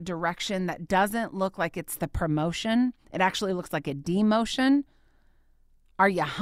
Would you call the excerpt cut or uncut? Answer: uncut